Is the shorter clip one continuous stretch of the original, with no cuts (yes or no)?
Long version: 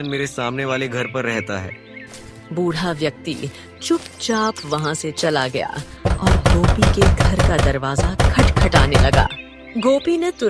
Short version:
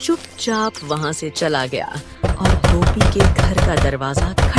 yes